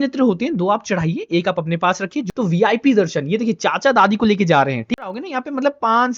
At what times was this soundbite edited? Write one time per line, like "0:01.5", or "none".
0:02.3
0:05.0